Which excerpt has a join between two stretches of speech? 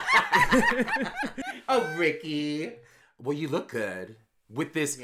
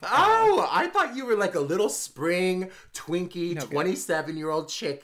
first; 1 cut; at 2.7 s

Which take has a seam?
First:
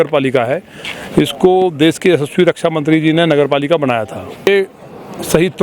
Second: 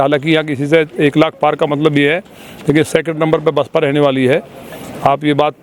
first; 1 cut; at 4.5 s

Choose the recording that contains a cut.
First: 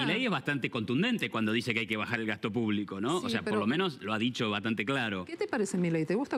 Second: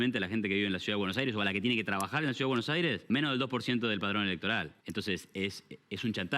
second; 2 cuts; at 3.2 s, 4.8 s

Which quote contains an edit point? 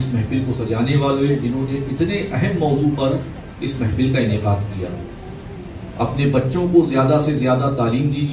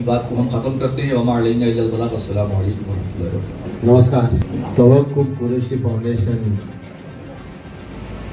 second; 2 cuts; at 3.6 s, 4.5 s

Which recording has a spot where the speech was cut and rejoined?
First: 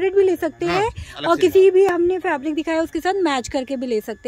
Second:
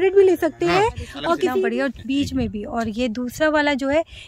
second; 1 cut; at 1.6 s

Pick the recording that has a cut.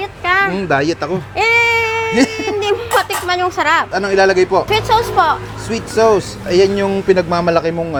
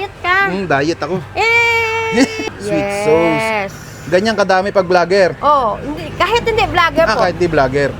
second; 1 cut; at 2.4 s

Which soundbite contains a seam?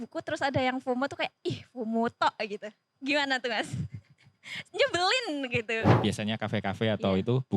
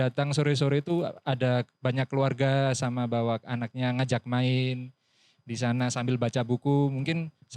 first; 1 cut; at 5.9 s

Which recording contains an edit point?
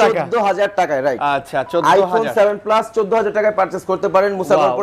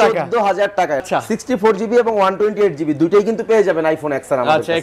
second; 1 cut; at 1.0 s

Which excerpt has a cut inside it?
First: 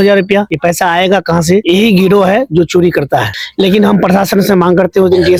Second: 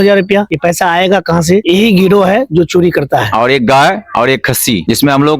second; 1 cut; at 3.3 s

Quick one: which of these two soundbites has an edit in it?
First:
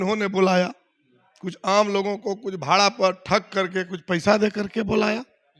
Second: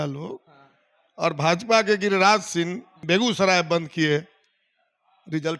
second; 1 cut; at 2.9 s

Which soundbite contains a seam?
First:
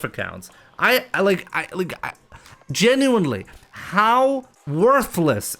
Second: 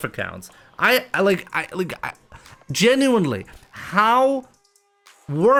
first; 1 cut; at 4.6 s

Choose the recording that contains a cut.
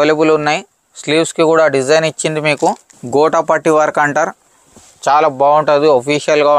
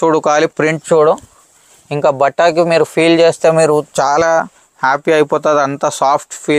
first; 1 cut; at 2.9 s

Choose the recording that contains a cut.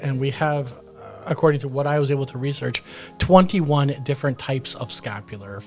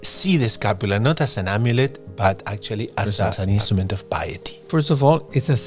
second; 2 cuts; at 3.4 s, 4.6 s

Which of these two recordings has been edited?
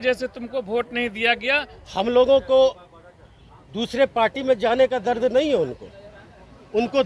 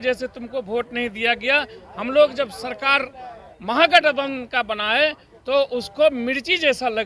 first; 1 cut; at 1.8 s

